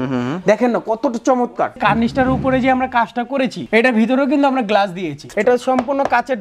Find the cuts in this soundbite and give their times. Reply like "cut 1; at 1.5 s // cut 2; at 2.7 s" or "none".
cut 1; at 1.8 s // cut 2; at 3.6 s // cut 3; at 5.2 s